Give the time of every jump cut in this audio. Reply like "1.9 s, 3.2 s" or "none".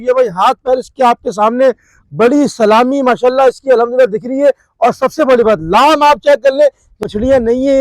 6.9 s

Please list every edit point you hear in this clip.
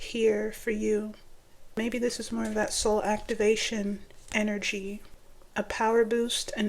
1.7 s, 5.1 s

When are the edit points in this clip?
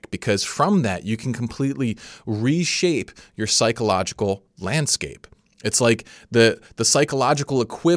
none

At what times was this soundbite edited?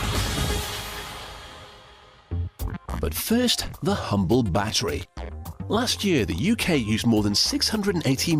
2.0 s

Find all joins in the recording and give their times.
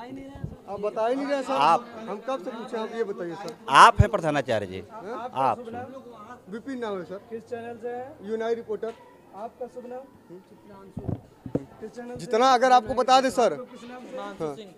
none

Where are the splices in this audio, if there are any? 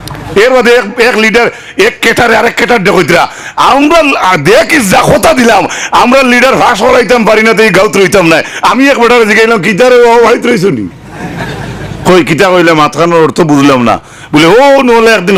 none

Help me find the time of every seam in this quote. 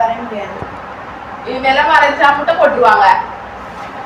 none

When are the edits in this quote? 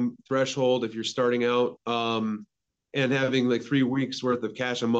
none

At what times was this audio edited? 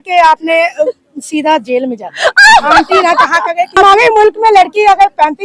3.8 s

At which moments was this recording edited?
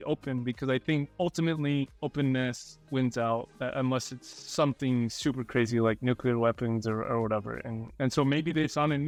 none

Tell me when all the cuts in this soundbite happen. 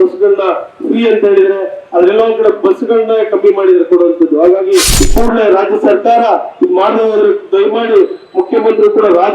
5.0 s

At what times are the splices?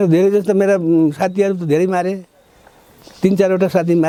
none

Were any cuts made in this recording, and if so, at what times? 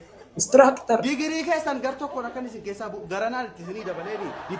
none

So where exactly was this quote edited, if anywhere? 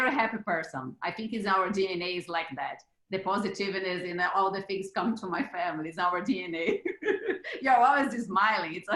none

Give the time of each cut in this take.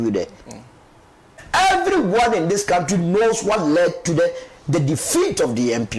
1.3 s

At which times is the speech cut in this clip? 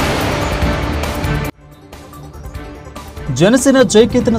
2.9 s

